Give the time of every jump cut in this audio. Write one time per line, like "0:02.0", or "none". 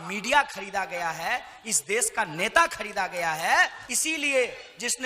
0:03.8